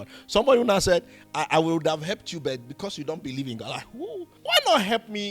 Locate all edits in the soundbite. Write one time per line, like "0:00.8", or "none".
0:04.3